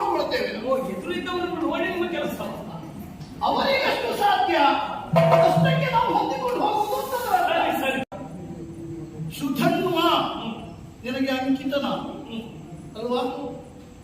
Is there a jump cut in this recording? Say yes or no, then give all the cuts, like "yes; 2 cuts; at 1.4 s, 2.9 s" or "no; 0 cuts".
yes; 1 cut; at 8.1 s